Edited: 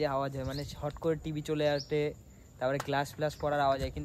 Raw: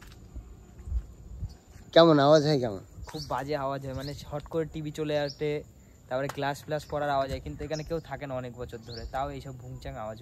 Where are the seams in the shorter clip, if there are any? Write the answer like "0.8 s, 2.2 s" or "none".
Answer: none